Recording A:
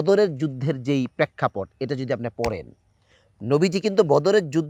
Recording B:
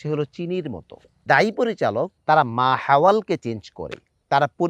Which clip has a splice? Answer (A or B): B